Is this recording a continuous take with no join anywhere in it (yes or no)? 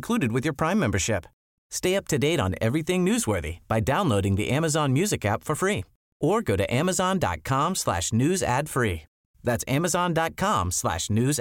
yes